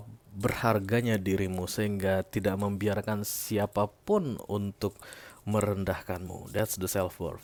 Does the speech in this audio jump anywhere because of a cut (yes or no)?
no